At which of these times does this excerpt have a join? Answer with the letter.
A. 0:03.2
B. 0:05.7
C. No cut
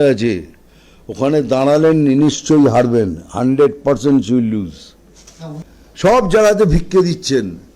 B